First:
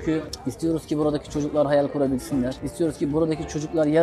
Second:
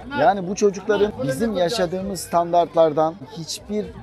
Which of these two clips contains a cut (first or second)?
second